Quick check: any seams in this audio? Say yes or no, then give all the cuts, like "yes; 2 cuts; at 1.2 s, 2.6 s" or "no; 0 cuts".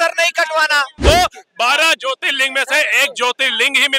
yes; 1 cut; at 1.0 s